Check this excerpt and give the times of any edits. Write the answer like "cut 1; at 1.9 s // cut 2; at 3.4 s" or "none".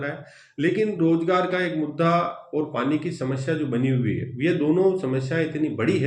none